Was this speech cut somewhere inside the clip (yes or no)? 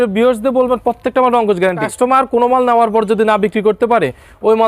yes